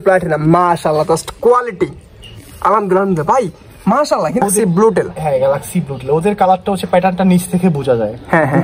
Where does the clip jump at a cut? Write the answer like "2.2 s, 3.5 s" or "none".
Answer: 4.4 s